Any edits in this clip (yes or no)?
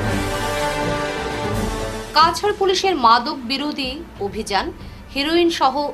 yes